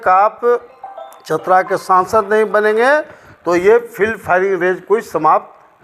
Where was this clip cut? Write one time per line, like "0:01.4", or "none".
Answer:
none